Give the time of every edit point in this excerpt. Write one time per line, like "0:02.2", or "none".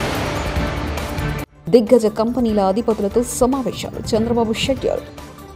0:01.5